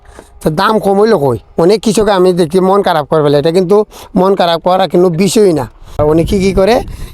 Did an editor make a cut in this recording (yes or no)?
yes